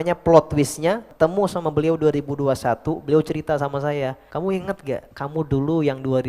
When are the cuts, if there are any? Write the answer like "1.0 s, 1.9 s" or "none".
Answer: 1.1 s, 4.2 s, 5.1 s